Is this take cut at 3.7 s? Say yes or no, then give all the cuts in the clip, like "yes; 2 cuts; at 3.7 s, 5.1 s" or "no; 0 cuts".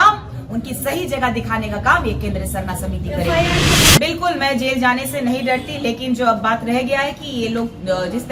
yes; 1 cut; at 3.7 s